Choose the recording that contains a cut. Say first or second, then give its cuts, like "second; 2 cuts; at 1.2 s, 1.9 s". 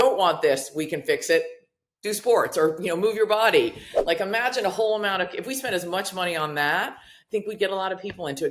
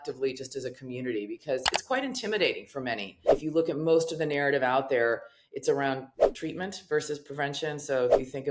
second; 2 cuts; at 3.3 s, 6.2 s